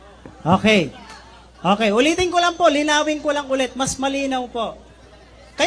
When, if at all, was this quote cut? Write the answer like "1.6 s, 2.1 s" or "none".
none